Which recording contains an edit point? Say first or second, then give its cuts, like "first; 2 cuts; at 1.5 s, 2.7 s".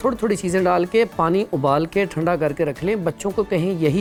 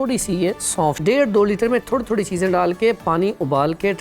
second; 1 cut; at 1.0 s